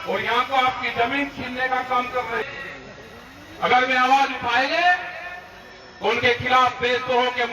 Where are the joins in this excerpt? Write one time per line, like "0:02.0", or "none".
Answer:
0:02.5